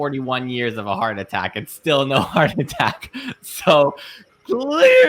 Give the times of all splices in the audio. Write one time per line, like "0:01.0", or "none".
none

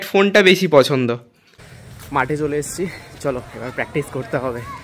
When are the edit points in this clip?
0:01.9

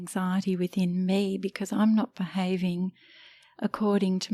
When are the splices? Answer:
none

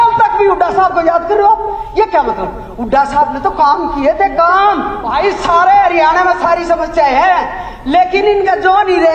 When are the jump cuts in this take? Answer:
0:05.0

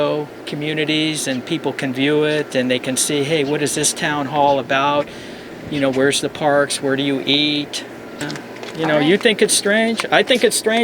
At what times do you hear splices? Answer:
0:08.2

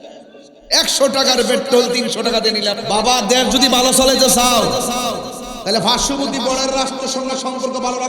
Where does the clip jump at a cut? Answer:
0:02.8

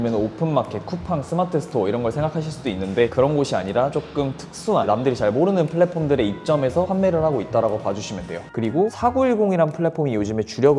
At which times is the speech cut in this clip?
0:08.5

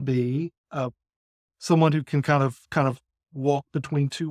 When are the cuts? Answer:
none

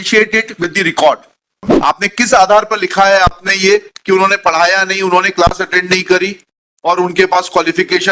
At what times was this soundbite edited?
0:01.7

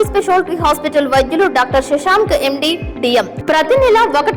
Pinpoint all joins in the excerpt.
0:03.4

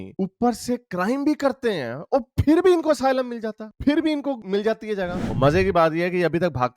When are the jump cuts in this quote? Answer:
0:05.2

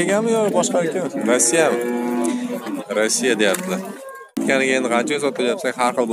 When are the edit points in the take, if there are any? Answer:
0:04.4

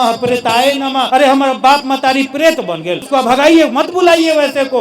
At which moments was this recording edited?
0:01.1
0:03.0

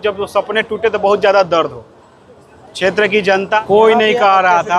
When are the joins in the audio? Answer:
0:03.6

